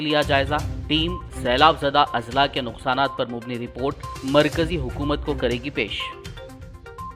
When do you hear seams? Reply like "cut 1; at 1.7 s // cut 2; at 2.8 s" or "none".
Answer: none